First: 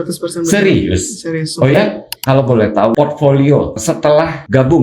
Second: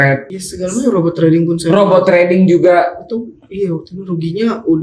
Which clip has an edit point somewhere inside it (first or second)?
first